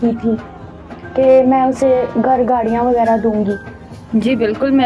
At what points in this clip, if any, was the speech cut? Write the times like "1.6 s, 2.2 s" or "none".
none